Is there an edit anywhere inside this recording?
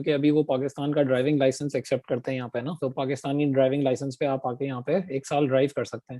yes; 1 cut; at 2.8 s

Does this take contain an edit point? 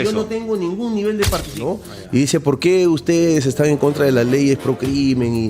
yes; 1 cut; at 1.6 s

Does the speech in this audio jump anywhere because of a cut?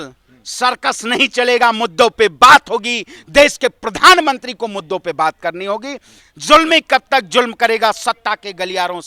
no; 0 cuts

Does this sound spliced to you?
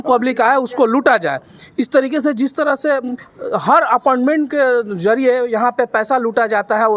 no; 0 cuts

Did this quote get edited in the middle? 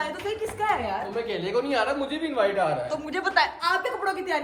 no; 0 cuts

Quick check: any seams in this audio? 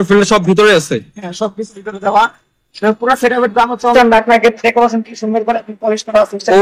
yes; 1 cut; at 3.8 s

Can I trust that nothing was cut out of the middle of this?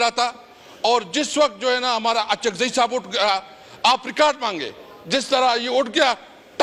yes; 0 cuts

